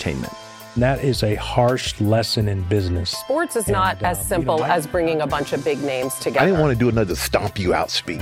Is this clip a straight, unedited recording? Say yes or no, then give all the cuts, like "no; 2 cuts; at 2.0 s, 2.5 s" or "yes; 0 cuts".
yes; 0 cuts